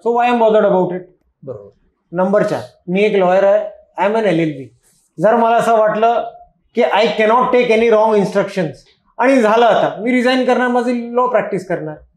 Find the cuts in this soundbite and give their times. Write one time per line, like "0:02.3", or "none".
none